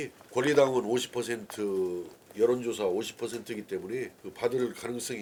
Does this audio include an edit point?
no; 0 cuts

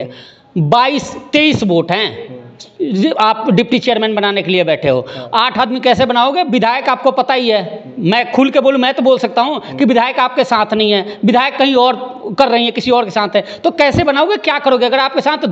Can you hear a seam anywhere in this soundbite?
no; 0 cuts

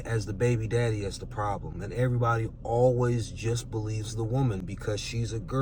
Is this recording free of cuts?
yes; 0 cuts

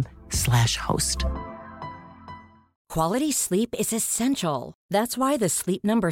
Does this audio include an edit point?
yes; 1 cut; at 2.8 s

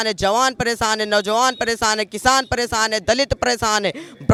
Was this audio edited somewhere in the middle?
no; 0 cuts

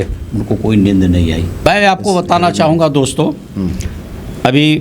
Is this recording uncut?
no; 1 cut; at 1.6 s

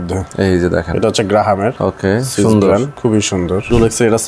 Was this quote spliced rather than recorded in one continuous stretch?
yes; 2 cuts; at 1.8 s, 3.3 s

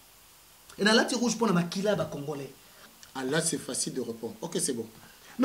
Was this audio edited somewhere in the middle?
yes; 1 cut; at 2.8 s

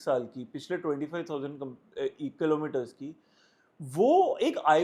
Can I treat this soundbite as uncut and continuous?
yes; 0 cuts

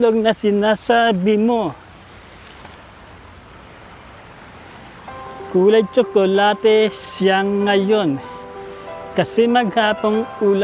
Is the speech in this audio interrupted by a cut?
no; 0 cuts

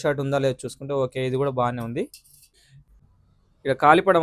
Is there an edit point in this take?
no; 0 cuts

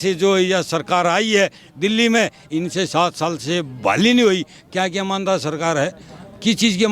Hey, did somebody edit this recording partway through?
no; 0 cuts

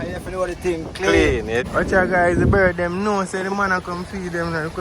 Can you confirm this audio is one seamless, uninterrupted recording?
no; 1 cut; at 1.7 s

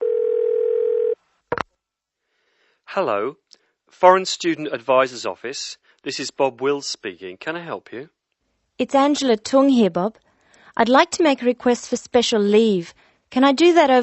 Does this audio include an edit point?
yes; 1 cut; at 1.0 s

